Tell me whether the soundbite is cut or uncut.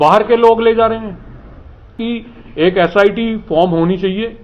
cut